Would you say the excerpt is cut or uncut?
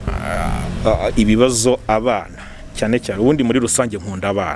uncut